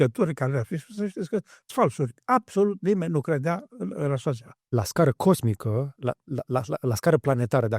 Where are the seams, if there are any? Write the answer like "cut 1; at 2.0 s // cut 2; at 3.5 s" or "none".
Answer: cut 1; at 4.5 s